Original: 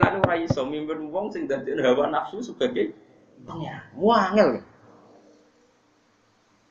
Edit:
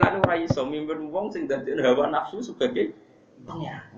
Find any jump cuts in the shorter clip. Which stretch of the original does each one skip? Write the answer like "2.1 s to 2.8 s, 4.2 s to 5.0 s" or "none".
none